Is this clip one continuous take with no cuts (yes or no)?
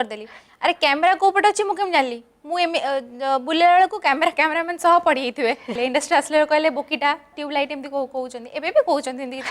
no